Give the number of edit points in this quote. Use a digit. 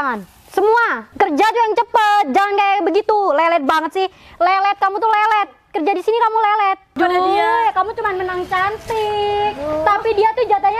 2